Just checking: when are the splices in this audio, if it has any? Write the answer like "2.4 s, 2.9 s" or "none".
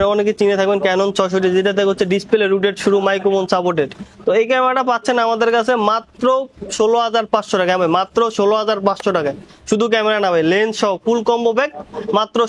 none